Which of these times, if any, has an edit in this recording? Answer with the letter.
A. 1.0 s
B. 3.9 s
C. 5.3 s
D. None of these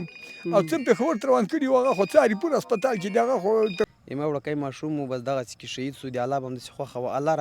B